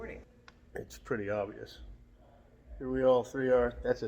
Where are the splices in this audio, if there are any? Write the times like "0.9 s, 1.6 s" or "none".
none